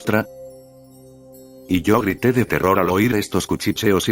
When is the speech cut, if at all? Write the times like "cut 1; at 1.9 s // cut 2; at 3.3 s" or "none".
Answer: cut 1; at 0.9 s // cut 2; at 2.6 s